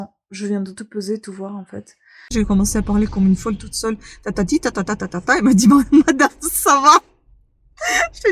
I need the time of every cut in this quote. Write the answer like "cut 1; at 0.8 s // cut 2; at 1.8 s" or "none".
cut 1; at 2.3 s